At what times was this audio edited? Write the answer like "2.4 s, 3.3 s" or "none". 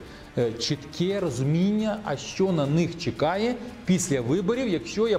none